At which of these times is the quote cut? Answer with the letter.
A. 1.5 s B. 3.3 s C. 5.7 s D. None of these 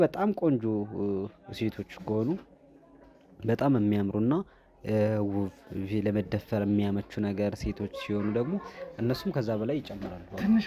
D